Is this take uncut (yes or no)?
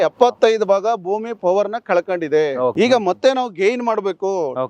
no